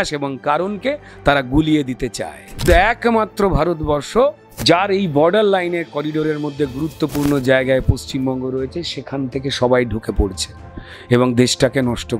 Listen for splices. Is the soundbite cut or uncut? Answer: cut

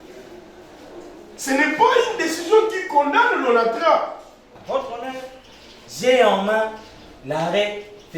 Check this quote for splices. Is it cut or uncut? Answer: cut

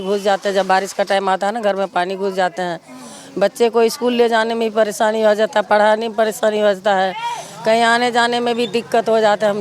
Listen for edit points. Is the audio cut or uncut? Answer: uncut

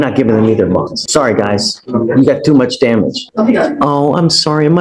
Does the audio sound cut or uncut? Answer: cut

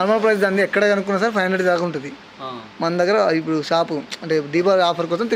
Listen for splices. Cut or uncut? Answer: uncut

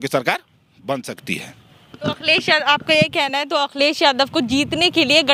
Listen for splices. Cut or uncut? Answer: uncut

